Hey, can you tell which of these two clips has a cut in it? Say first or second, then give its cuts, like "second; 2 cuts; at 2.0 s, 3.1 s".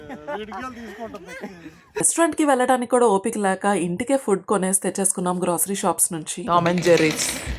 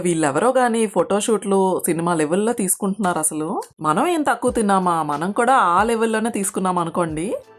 first; 2 cuts; at 2.1 s, 6.3 s